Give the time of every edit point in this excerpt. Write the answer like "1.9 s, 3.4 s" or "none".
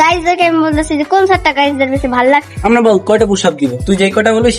2.5 s

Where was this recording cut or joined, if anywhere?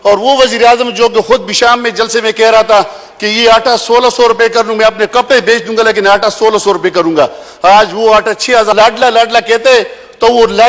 8.7 s

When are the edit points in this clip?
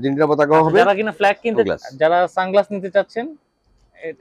1.7 s

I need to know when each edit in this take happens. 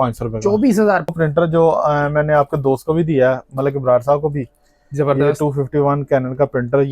1.1 s

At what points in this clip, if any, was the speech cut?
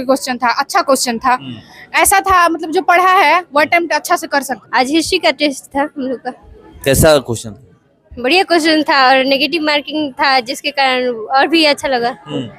4.6 s

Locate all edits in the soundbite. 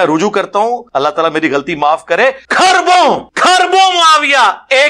0.8 s, 2.4 s, 3.3 s

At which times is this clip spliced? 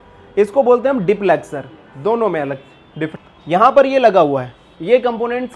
3.1 s

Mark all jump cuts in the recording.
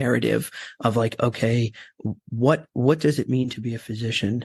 2.7 s

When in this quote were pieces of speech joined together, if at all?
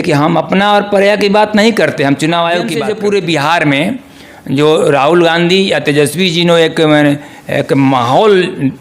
2.8 s

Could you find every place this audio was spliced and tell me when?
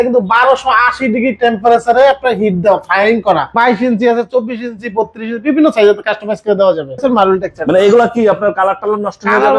3.5 s, 7.0 s

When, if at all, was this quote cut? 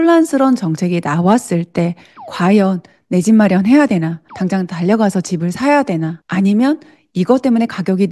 none

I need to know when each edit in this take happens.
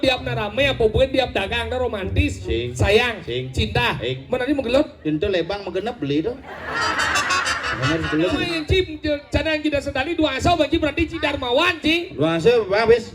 8.5 s

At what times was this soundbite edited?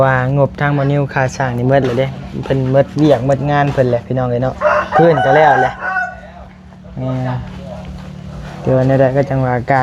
none

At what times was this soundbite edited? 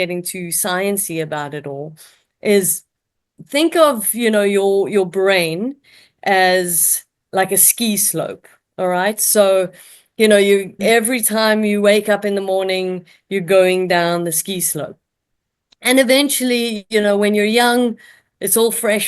3.4 s

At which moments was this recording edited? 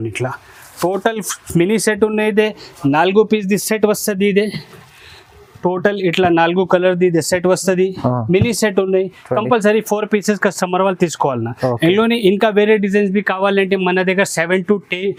none

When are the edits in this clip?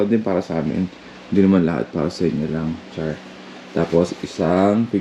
none

